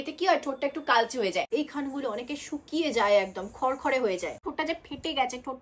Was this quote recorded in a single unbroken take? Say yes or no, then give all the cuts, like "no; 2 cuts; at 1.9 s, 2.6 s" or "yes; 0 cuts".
no; 2 cuts; at 1.5 s, 4.4 s